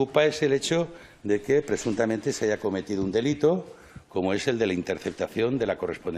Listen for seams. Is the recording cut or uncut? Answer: uncut